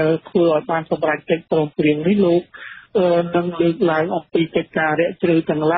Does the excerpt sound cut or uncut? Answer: uncut